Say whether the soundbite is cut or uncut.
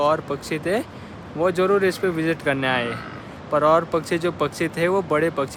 uncut